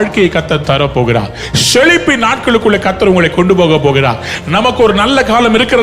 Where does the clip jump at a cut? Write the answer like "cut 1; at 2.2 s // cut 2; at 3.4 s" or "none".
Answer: none